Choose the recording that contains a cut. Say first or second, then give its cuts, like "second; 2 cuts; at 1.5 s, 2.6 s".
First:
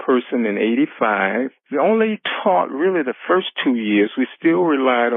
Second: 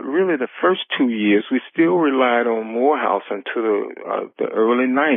first; 1 cut; at 1.6 s